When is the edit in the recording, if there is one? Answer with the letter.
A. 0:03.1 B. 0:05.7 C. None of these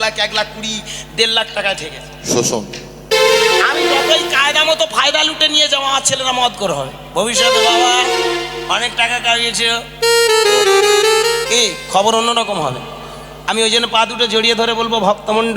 A